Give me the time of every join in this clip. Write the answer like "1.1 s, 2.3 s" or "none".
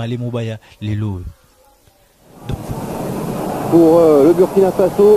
2.6 s